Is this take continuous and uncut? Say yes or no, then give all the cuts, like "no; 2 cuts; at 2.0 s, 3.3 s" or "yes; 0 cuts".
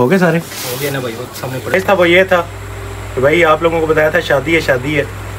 no; 1 cut; at 1.7 s